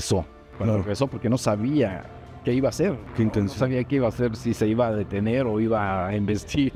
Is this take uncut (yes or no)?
yes